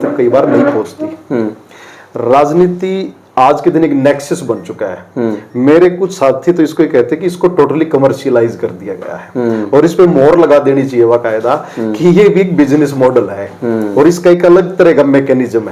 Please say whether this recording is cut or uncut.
uncut